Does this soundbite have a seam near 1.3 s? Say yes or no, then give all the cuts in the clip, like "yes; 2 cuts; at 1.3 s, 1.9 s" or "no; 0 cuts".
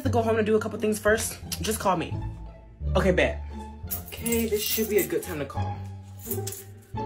no; 0 cuts